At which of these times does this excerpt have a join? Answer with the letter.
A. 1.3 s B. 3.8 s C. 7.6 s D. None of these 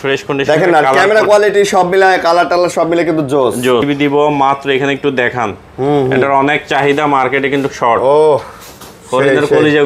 B